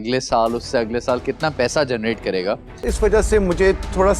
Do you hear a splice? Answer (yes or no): yes